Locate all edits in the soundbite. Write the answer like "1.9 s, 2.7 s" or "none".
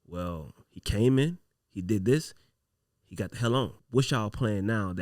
3.8 s